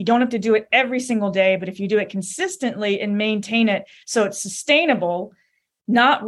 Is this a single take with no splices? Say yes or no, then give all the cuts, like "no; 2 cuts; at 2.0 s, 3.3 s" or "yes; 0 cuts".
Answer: yes; 0 cuts